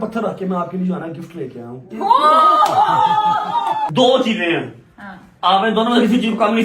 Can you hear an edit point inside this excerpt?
yes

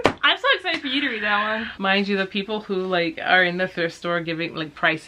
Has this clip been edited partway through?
yes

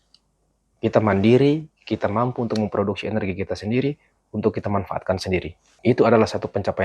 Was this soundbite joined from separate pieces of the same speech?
yes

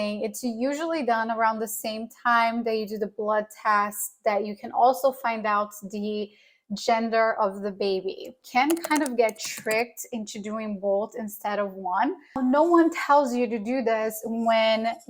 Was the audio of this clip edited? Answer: yes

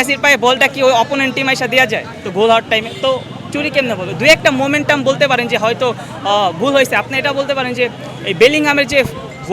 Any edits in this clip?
no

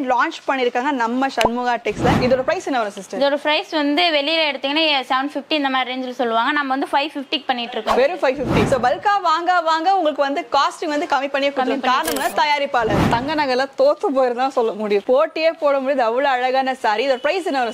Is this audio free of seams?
no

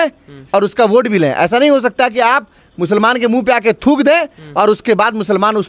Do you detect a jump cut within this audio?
no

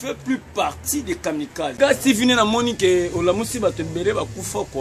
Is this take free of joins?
no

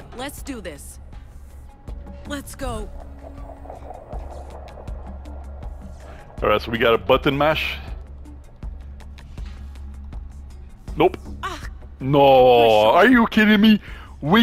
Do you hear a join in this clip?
no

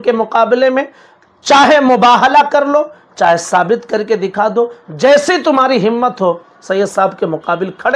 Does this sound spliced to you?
no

